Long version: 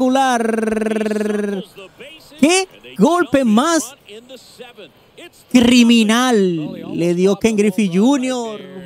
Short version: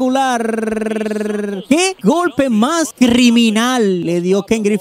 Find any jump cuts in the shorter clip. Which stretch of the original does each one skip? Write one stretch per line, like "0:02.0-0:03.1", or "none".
0:01.8-0:02.8
0:03.9-0:05.4
0:06.6-0:07.0